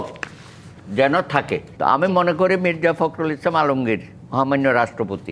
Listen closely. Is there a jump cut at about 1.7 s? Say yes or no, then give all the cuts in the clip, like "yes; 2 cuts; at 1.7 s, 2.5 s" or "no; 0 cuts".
yes; 1 cut; at 1.7 s